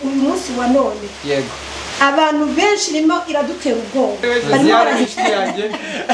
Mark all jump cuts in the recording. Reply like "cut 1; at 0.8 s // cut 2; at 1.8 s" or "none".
cut 1; at 4.9 s